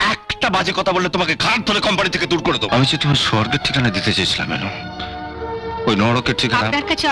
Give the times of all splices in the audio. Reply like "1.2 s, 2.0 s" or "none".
2.7 s